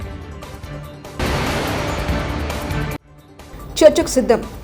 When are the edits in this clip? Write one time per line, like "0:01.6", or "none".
0:01.2
0:03.0